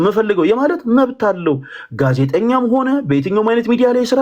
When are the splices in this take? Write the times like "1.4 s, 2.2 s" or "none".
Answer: none

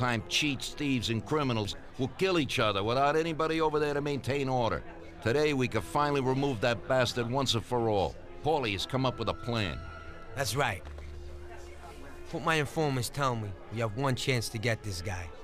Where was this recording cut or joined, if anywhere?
13.1 s

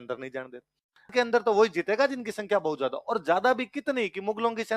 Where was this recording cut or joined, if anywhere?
1.1 s

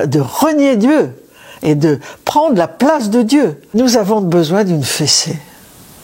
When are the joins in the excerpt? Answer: 3.7 s

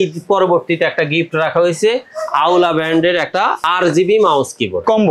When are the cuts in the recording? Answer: 3.6 s

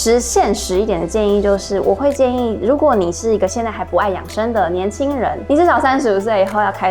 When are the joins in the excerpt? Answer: none

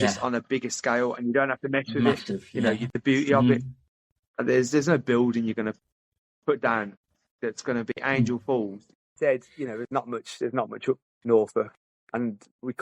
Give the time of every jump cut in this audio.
8.9 s

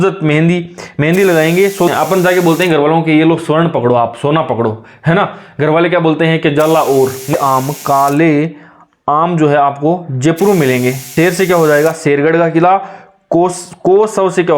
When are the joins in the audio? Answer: 1.9 s, 7.3 s, 11.0 s

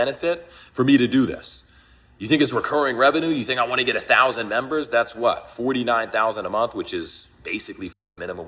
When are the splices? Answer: none

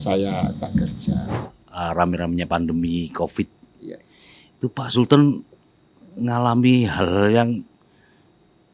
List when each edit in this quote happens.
1.4 s

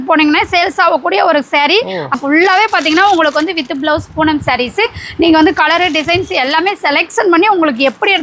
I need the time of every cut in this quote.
2.1 s

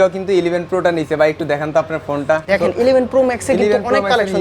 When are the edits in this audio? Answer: 2.4 s

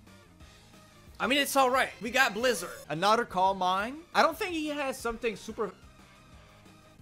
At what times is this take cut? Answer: 2.3 s, 4.0 s

